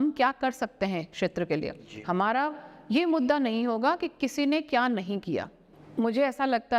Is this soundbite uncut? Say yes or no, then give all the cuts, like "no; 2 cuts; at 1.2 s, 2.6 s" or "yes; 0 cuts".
yes; 0 cuts